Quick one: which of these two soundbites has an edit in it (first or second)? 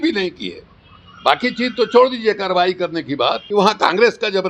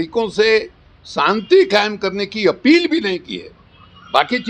first